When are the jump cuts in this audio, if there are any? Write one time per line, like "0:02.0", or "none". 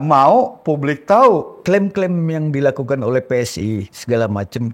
0:01.5

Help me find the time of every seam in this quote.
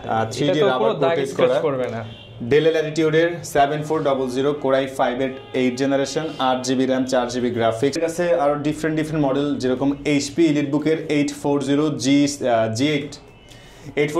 0:08.0

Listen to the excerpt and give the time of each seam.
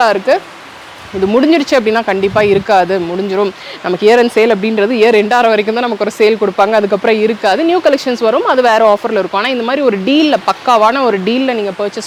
none

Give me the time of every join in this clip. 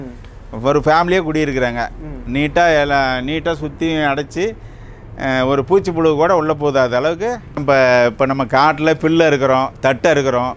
0:07.6

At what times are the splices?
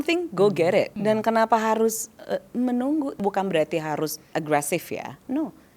0:00.9
0:03.2
0:04.3

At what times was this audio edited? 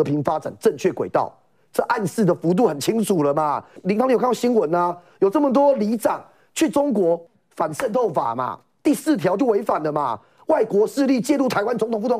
0:03.7
0:07.3

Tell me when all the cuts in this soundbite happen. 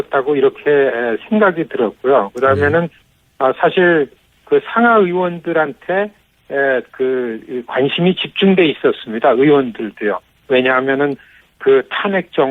none

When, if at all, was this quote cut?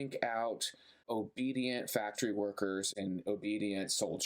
0:01.0
0:02.9

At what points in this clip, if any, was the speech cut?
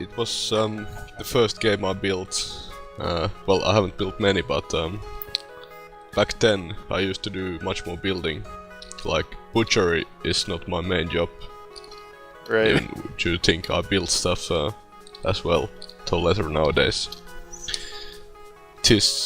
0:10.5

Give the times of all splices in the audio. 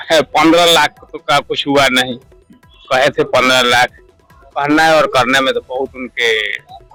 none

